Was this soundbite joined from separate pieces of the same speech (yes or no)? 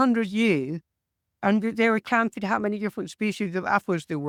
no